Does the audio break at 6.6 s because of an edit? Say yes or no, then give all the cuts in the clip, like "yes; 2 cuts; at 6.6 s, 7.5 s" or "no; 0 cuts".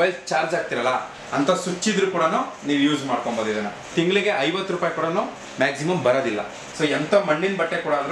yes; 2 cuts; at 3.9 s, 6.6 s